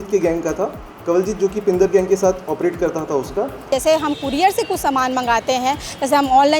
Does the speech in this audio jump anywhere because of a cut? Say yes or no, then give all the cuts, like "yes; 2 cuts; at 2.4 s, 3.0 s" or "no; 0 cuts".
yes; 1 cut; at 3.7 s